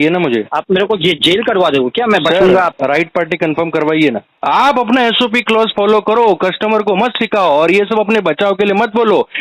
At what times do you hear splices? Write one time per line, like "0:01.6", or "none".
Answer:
0:02.7
0:04.3